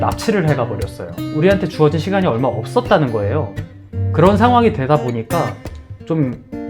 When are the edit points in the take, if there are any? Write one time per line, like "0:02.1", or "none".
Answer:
0:01.3